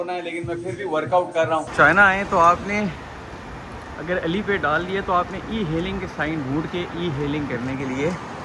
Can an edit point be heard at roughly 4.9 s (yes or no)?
no